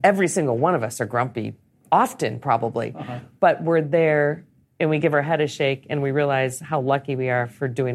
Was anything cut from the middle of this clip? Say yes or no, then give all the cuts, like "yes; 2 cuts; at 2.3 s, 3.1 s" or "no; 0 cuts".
no; 0 cuts